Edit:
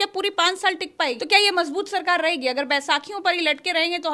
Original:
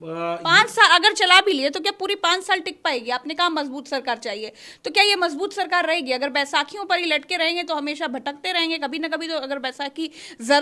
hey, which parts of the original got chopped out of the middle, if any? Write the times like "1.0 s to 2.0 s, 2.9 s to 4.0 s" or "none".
3.0 s to 4.8 s